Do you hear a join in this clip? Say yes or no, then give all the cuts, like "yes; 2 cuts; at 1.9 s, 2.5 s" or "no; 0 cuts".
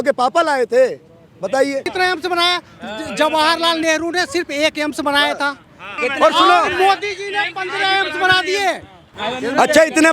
yes; 3 cuts; at 1.9 s, 5.8 s, 9.1 s